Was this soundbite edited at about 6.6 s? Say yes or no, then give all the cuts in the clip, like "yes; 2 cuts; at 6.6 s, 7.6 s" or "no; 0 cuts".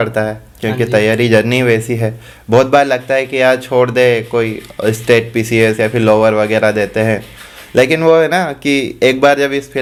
no; 0 cuts